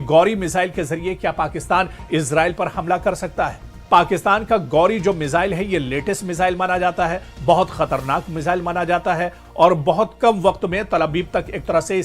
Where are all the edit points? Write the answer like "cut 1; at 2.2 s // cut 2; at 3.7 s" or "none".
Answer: cut 1; at 3.8 s // cut 2; at 9.4 s

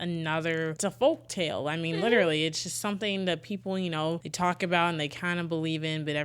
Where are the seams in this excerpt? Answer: cut 1; at 0.8 s // cut 2; at 4.3 s

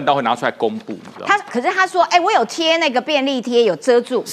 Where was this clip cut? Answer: none

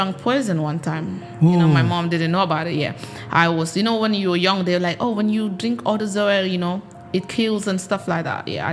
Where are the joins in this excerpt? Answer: none

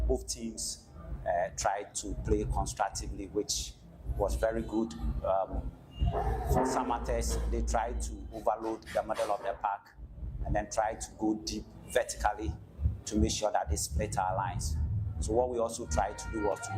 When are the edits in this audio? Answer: cut 1; at 1.9 s

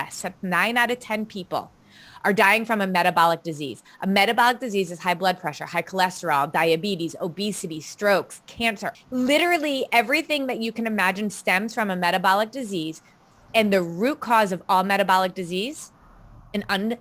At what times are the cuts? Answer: cut 1; at 8.9 s

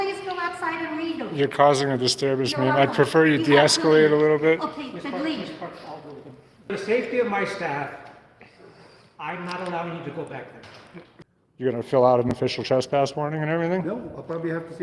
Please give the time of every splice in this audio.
cut 1; at 6.7 s // cut 2; at 11.1 s

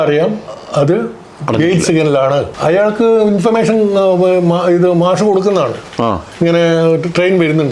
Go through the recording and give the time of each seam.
cut 1; at 2.5 s

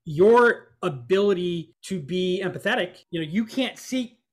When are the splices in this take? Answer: cut 1; at 1.7 s // cut 2; at 3.0 s

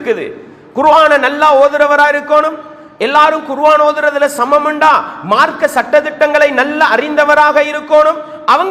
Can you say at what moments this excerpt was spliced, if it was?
none

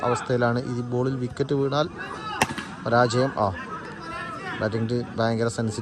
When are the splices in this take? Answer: none

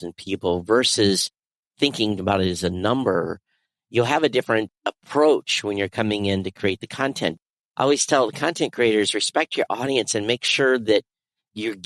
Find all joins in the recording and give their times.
cut 1; at 7.4 s

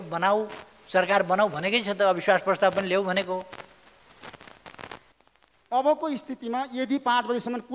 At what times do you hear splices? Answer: cut 1; at 5.2 s

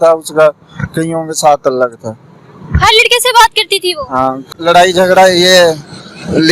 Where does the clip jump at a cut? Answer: cut 1; at 4.4 s

